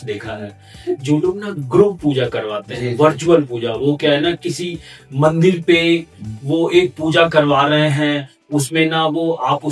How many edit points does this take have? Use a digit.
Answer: 0